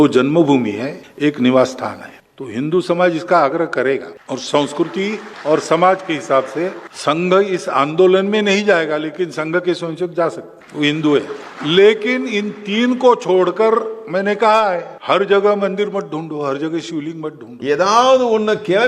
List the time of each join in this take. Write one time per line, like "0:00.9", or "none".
0:17.6

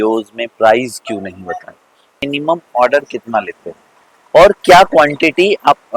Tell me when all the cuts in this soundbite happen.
0:02.1

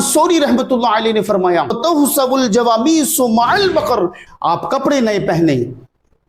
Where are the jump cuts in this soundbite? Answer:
0:04.2

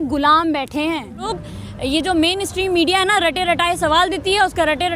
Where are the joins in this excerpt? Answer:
0:01.4

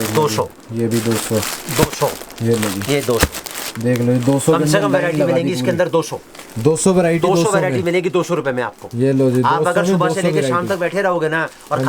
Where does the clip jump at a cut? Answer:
none

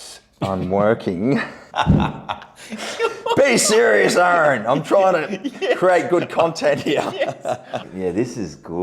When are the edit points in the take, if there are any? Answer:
0:01.6
0:07.9

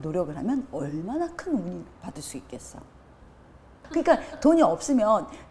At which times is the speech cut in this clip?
0:03.8

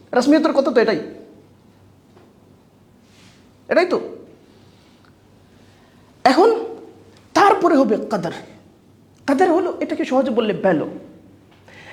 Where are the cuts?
none

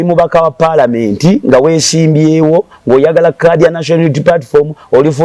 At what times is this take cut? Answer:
none

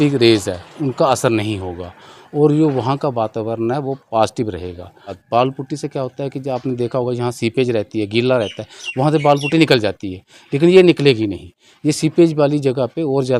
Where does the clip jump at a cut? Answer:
0:05.2

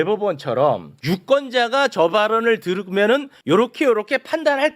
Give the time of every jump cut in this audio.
0:00.9
0:03.3

